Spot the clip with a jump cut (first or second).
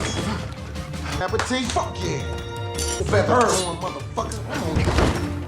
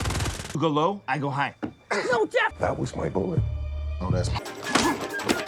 first